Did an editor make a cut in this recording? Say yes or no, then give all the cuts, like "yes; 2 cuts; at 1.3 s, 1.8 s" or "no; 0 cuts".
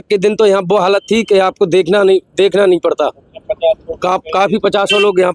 no; 0 cuts